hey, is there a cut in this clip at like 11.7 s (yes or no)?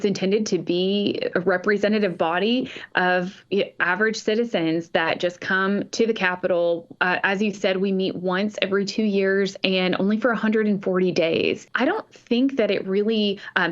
yes